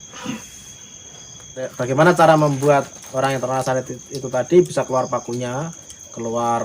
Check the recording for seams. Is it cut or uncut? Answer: cut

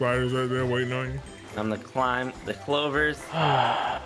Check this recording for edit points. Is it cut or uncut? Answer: uncut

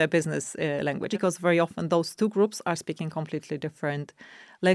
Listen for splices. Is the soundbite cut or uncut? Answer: cut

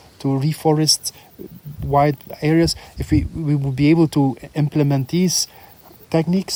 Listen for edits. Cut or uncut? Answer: uncut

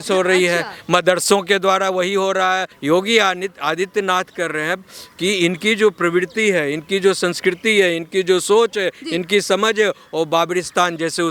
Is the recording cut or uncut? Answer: cut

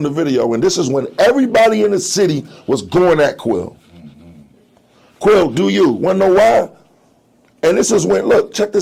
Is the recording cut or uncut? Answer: uncut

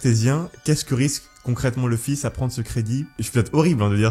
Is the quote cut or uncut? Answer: cut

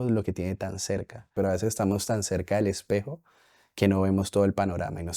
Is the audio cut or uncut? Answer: uncut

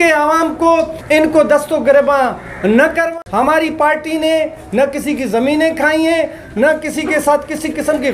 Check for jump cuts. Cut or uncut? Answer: cut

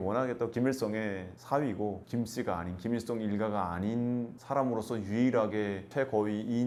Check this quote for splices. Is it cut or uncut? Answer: uncut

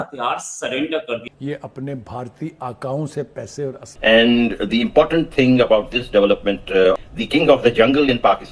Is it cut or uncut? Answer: cut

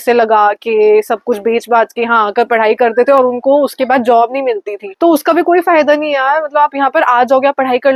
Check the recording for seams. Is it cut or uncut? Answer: uncut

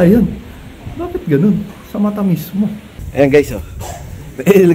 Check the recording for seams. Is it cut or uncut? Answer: cut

